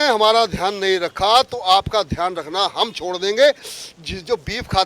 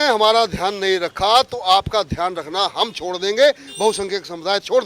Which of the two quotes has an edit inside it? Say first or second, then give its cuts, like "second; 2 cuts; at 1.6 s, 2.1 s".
first; 1 cut; at 3.7 s